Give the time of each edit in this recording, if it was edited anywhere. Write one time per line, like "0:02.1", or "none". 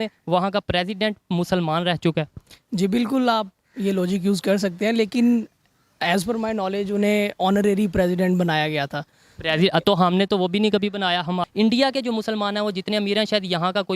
0:11.4